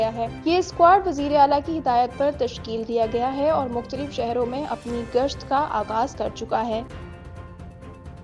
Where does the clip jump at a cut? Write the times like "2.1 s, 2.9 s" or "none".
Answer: 6.8 s